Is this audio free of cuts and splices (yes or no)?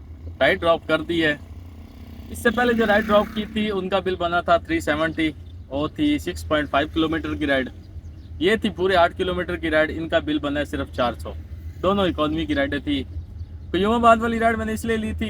yes